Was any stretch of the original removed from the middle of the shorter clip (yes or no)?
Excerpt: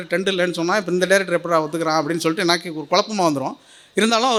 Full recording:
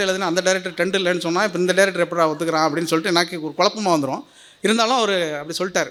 no